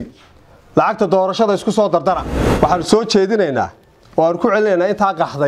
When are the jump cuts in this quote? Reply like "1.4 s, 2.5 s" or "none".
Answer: 2.3 s